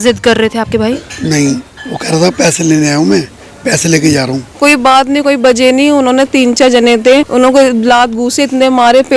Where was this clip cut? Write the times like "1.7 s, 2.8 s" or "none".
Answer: 4.5 s, 7.3 s